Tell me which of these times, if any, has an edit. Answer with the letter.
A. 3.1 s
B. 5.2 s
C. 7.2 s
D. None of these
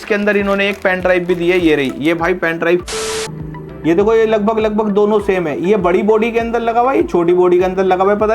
A